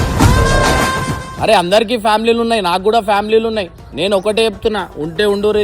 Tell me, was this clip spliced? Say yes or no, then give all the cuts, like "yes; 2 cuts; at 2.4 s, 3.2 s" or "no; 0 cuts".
yes; 1 cut; at 1.3 s